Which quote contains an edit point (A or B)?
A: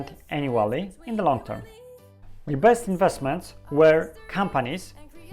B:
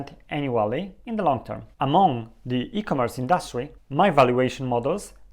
A